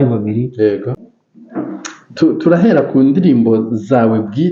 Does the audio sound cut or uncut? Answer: cut